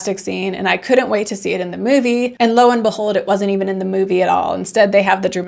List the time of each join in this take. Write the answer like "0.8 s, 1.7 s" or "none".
none

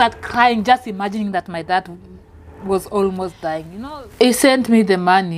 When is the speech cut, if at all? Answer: 3.7 s

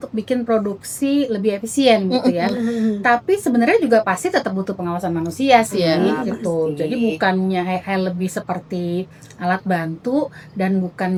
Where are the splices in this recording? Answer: none

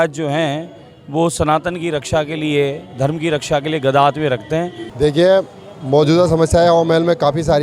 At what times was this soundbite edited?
4.8 s

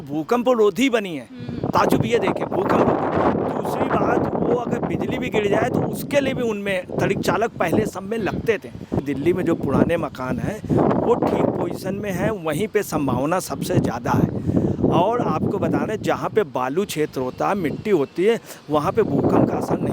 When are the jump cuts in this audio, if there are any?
9.0 s

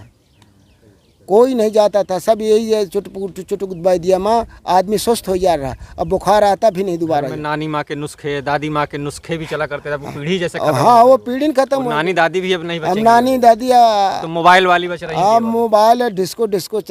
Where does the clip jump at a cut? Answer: none

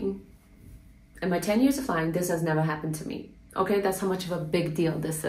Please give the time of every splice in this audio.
none

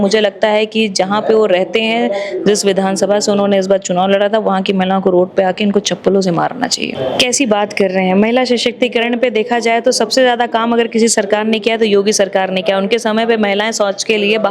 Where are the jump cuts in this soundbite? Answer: 6.9 s

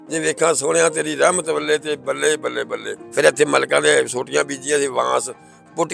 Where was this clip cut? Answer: 3.0 s

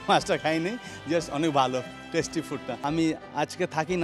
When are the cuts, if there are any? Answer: 2.7 s

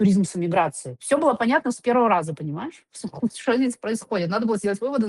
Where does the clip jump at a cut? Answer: 0.9 s

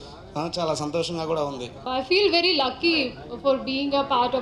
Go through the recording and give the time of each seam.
1.9 s

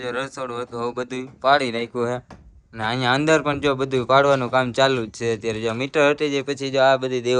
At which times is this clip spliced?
none

